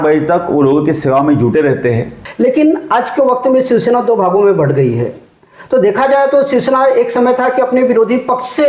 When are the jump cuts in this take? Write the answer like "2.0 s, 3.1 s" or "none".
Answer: 2.2 s